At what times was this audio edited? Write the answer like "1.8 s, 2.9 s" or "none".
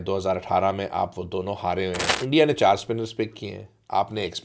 2.1 s